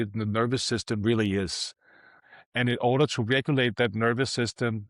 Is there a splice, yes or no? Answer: yes